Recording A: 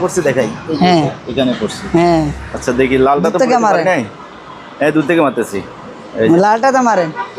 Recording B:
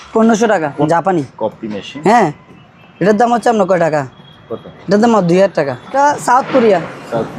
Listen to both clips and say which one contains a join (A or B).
B